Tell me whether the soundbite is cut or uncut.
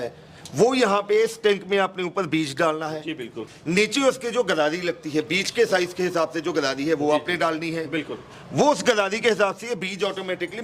uncut